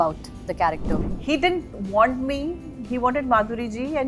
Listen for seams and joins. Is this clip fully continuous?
no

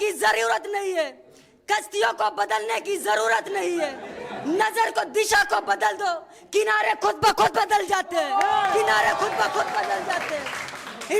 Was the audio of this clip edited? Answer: no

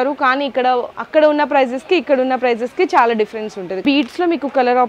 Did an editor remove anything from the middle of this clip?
yes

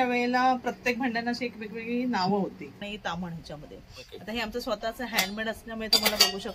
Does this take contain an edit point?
yes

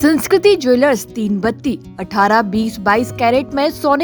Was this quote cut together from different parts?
no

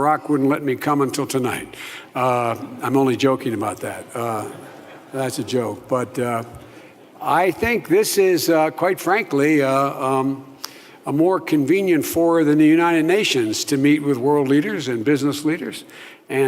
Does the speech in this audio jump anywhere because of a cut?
yes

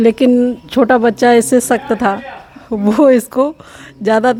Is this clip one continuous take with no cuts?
yes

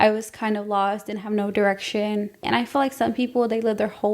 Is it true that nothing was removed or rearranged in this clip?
no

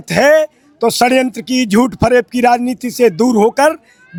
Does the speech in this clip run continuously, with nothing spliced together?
yes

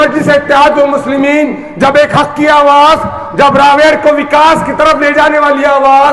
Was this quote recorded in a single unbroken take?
yes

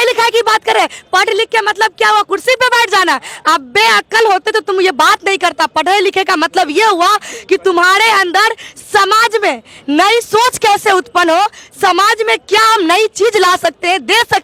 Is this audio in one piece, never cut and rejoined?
yes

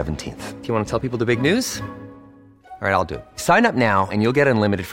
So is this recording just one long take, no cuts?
yes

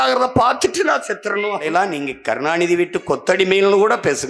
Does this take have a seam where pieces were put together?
yes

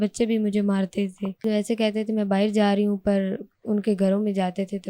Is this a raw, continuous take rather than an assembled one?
no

